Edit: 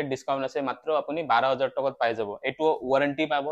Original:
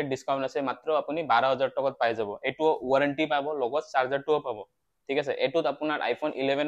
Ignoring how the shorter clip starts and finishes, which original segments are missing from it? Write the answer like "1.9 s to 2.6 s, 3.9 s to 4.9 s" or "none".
none

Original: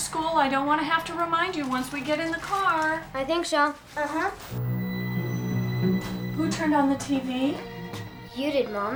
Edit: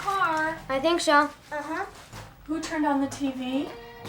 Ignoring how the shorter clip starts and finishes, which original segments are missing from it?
4.7 s to 6.1 s

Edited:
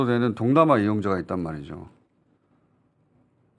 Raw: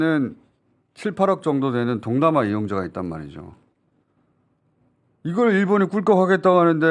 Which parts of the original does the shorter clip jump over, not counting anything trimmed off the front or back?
none

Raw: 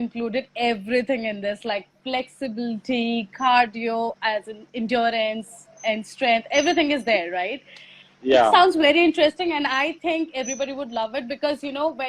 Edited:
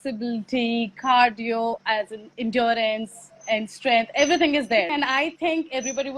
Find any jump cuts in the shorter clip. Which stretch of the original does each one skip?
7.3 s to 9.5 s

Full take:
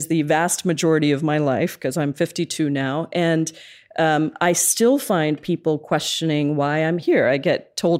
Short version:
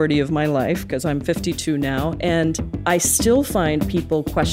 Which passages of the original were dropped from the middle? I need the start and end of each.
3.7 s to 4.3 s

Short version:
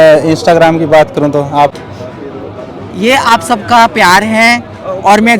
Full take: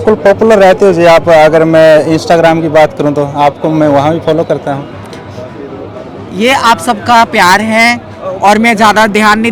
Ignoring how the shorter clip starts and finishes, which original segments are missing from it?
3.6 s to 5.1 s

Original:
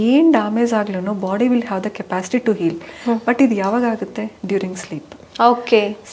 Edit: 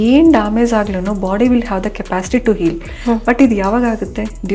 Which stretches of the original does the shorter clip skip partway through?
none

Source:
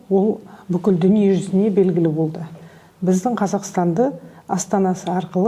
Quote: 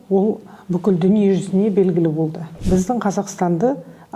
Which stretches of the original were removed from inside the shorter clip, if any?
2.5 s to 2.8 s

